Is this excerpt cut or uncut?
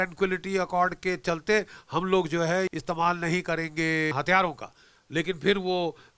cut